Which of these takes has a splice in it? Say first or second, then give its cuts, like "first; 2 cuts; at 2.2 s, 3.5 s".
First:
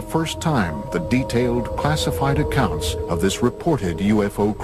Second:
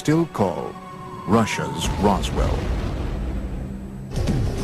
first; 1 cut; at 0.9 s